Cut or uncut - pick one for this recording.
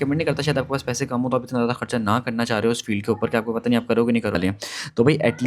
cut